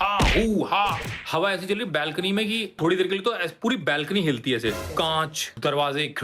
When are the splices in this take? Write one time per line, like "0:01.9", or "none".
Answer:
0:02.8
0:05.2